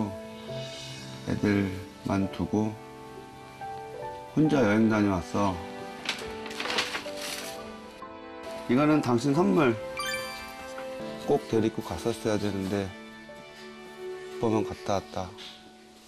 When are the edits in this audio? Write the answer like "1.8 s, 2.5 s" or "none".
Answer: 11.0 s